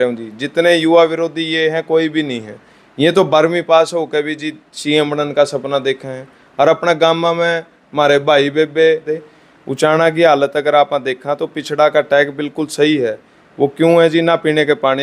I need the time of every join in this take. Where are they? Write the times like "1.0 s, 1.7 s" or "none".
9.0 s